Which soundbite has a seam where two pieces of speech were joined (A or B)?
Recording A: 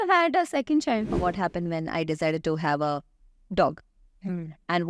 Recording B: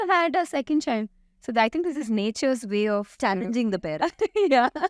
A